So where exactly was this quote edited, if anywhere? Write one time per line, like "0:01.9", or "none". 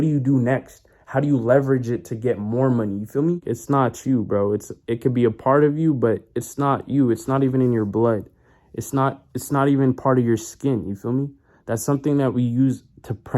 0:03.4